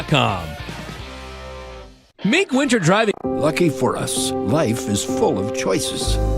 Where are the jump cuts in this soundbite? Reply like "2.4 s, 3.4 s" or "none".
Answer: 2.6 s, 3.1 s

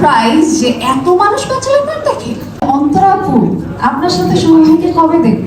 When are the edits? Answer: 2.6 s

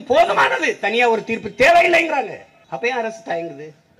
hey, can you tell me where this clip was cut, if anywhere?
2.5 s

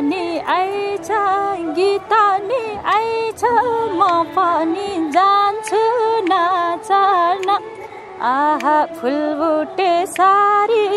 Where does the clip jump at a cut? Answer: none

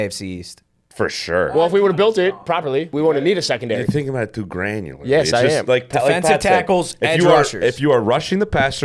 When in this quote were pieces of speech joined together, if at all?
1.5 s, 2.9 s

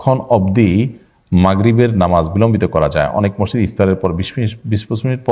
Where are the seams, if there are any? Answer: none

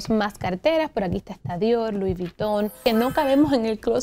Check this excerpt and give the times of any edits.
2.8 s

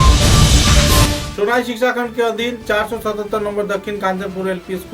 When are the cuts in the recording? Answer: none

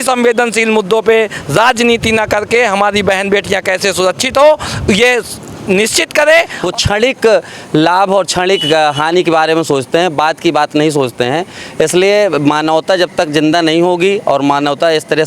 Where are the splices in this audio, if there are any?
6.6 s

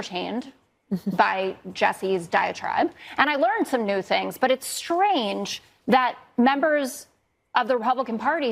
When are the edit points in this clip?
none

